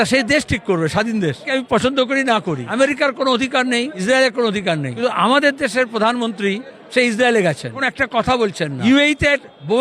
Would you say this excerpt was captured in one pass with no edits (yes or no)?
no